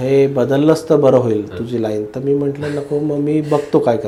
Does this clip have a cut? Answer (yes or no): no